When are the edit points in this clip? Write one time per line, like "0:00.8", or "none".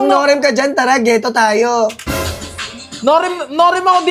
none